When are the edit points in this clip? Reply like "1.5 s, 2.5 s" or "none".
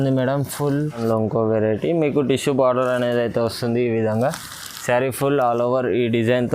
1.0 s